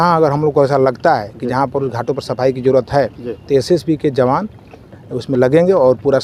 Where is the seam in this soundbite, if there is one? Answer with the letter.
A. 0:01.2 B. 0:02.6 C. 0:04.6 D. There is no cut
D